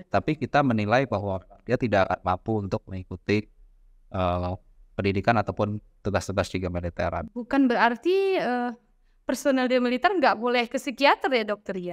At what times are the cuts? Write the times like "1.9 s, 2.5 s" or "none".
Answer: 7.2 s